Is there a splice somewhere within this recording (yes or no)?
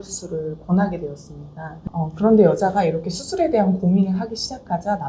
yes